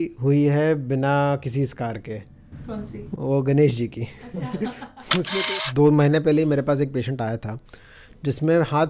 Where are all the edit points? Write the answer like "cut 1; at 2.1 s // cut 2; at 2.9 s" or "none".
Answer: cut 1; at 5.4 s

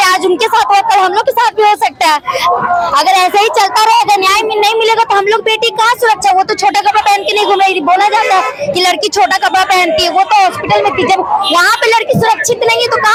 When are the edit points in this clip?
none

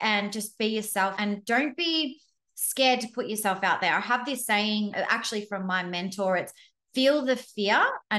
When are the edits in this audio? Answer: cut 1; at 1.1 s // cut 2; at 4.9 s

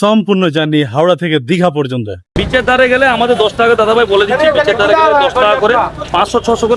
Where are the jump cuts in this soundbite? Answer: cut 1; at 2.3 s

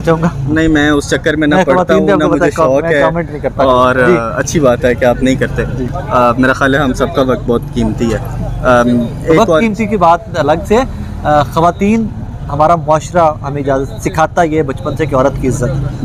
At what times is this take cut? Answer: none

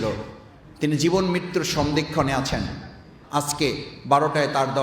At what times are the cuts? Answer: cut 1; at 3.2 s

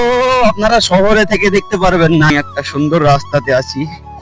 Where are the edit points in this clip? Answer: cut 1; at 2.3 s

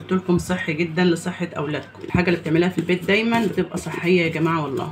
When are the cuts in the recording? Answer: cut 1; at 2.0 s

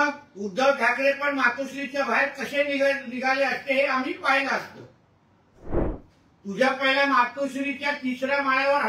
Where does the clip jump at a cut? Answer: cut 1; at 5.9 s

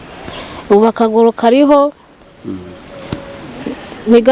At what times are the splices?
none

